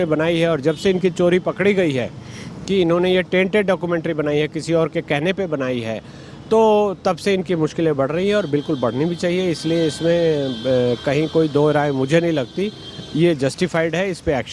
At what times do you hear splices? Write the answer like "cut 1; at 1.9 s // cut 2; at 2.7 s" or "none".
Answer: none